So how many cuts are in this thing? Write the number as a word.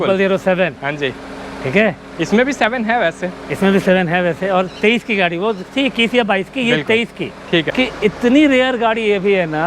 one